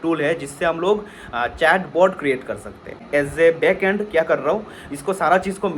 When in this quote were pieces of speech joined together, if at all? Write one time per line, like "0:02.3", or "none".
0:03.0